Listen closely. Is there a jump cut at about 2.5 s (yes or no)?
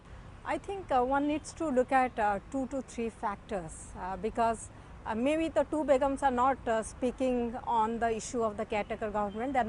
no